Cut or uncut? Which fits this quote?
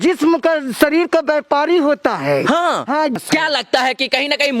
cut